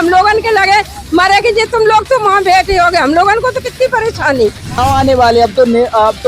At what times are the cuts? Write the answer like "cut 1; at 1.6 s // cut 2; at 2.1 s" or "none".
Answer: cut 1; at 4.8 s